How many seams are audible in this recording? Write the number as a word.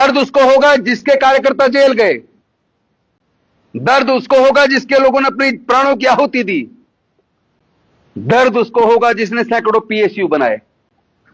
zero